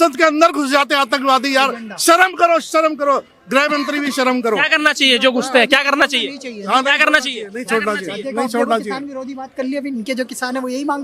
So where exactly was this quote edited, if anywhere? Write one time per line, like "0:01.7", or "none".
none